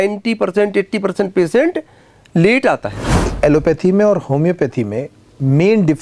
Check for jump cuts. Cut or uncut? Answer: cut